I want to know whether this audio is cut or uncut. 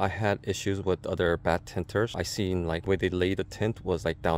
uncut